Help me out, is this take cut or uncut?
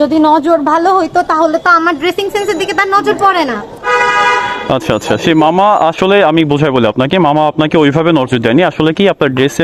uncut